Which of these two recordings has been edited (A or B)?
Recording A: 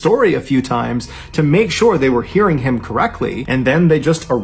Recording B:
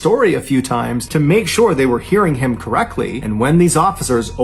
B